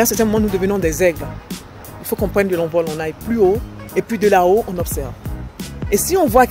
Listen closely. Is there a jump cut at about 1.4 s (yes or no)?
no